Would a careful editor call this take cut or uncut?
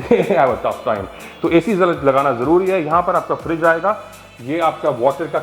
uncut